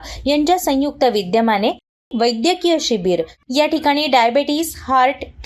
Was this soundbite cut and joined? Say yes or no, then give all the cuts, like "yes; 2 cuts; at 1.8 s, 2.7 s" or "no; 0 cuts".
yes; 1 cut; at 3.4 s